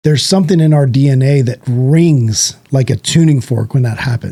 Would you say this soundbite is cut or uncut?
uncut